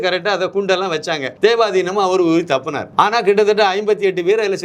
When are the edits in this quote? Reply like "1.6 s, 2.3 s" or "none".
1.3 s, 2.8 s